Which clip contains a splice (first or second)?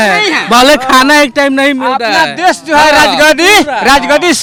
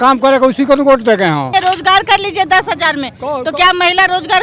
second